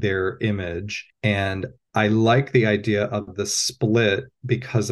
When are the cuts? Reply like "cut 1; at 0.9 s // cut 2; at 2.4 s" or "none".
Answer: cut 1; at 1.0 s // cut 2; at 1.8 s